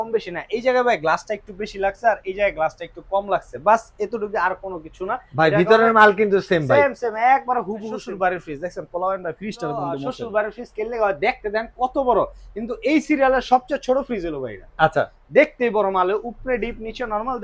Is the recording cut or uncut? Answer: cut